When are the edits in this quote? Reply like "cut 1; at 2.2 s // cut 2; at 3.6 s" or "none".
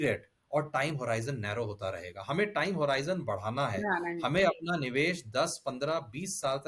none